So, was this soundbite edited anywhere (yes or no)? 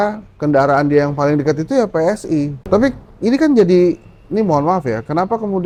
no